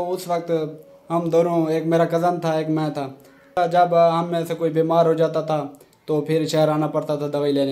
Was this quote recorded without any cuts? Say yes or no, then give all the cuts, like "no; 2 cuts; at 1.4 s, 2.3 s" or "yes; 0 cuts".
no; 1 cut; at 3.5 s